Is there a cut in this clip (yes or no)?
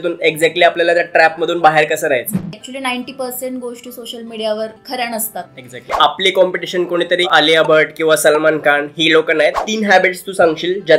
yes